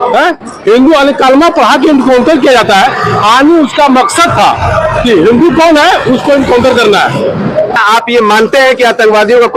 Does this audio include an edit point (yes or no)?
yes